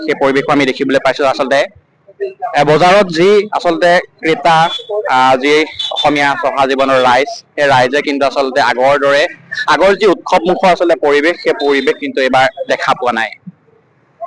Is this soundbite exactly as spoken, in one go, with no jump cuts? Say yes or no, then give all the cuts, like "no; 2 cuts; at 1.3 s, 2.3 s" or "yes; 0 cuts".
yes; 0 cuts